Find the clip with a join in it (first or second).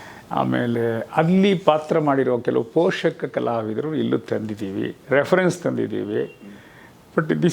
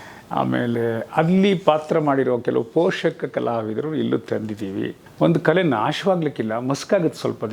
second